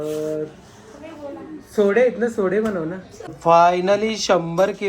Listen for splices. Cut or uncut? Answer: cut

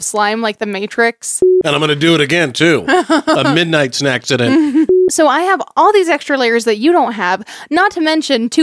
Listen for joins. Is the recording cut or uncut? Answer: cut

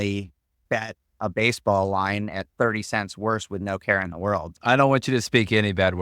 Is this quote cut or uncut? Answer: cut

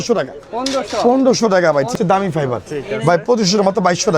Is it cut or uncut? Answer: cut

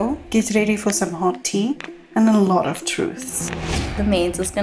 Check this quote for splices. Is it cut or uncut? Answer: cut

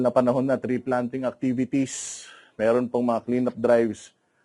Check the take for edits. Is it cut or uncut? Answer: uncut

